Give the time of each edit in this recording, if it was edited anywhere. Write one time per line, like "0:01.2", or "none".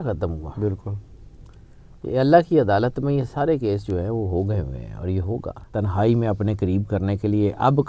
0:05.6